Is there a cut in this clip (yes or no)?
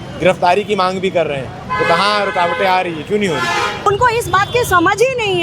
yes